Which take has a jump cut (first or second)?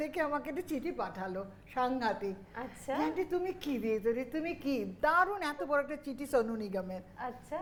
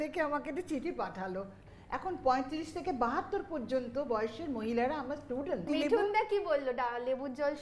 second